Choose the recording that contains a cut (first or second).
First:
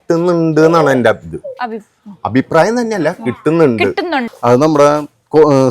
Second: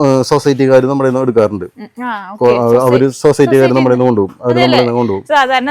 first